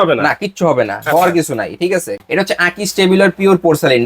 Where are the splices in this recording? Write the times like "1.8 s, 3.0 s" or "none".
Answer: 2.2 s